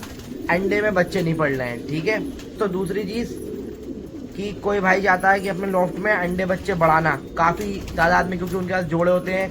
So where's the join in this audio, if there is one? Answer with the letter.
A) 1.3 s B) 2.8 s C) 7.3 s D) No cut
B